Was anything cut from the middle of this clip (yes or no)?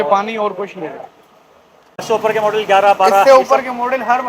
yes